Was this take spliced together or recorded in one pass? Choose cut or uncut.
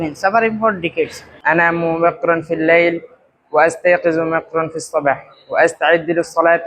cut